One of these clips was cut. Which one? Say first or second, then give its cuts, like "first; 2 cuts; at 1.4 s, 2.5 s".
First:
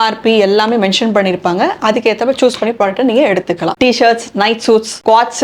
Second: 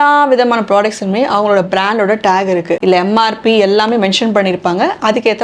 first; 1 cut; at 3.7 s